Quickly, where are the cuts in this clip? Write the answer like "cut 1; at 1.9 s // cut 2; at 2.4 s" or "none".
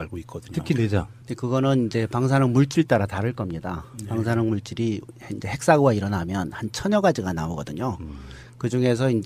none